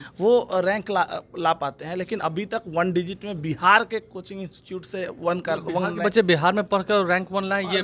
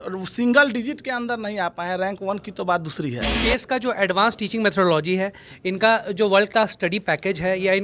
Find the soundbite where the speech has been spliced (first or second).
second